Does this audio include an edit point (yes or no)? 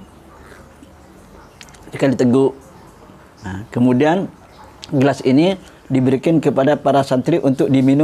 no